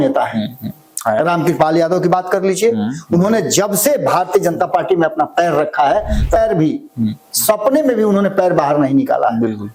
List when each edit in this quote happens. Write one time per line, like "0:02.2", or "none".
0:06.4